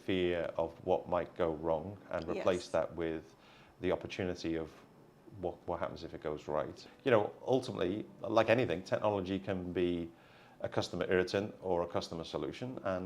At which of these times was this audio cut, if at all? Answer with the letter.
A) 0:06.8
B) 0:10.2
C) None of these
A